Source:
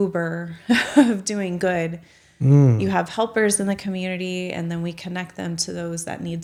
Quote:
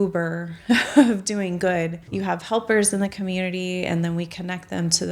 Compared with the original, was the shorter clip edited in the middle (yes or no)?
yes